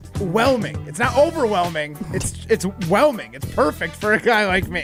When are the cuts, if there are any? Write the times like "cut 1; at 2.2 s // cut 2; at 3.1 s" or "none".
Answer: none